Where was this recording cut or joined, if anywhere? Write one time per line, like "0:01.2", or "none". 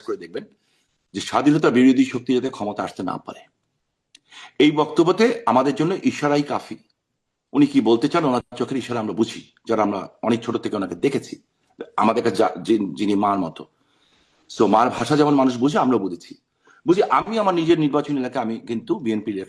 none

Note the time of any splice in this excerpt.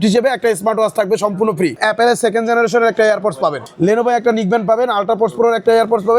0:01.8
0:03.6

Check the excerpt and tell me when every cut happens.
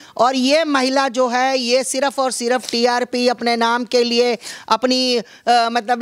none

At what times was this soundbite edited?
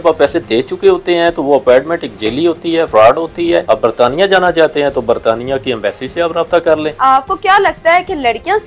0:03.6
0:06.9

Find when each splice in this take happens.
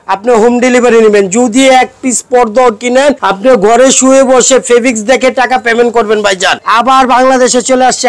0:03.3
0:06.5

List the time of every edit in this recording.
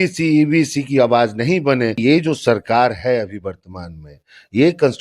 0:02.0

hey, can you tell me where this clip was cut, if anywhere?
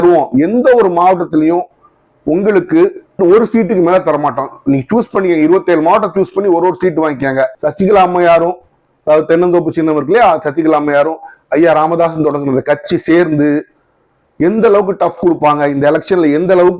0:07.6

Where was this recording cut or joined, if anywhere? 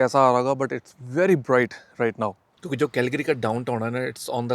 0:02.5

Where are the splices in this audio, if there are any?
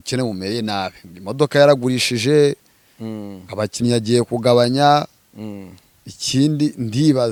none

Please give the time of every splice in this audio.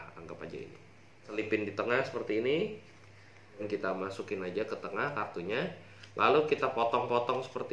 0:01.3
0:03.7

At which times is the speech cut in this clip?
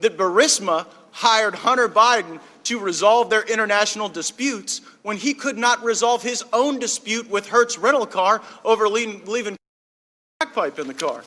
none

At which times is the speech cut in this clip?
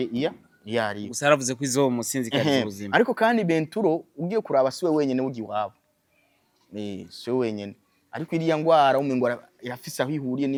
none

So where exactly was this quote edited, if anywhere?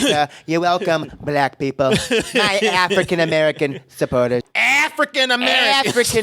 0:04.6

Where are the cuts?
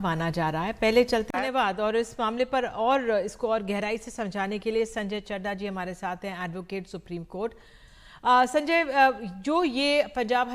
0:01.3

